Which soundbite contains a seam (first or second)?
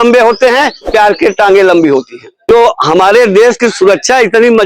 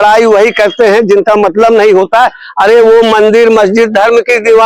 first